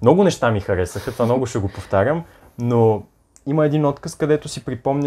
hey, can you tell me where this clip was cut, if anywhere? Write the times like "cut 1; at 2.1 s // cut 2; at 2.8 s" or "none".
none